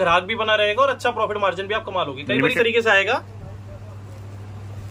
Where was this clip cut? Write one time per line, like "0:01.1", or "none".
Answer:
0:02.5